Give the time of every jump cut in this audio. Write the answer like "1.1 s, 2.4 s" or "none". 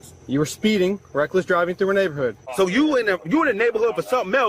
2.4 s